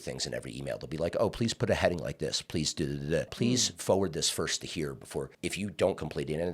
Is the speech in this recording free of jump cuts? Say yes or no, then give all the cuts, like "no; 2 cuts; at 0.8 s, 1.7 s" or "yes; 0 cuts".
no; 2 cuts; at 3.3 s, 5.3 s